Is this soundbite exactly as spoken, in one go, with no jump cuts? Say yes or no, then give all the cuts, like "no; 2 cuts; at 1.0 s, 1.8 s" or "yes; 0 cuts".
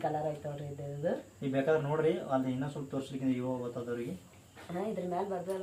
yes; 0 cuts